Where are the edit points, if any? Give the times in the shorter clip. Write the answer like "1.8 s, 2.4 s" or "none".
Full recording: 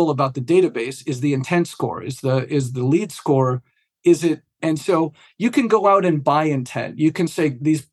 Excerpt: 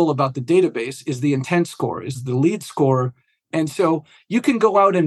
2.2 s, 3.4 s